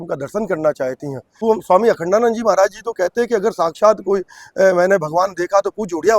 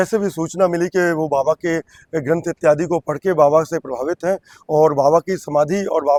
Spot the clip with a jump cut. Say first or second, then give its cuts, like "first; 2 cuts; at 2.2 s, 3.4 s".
first; 1 cut; at 1.3 s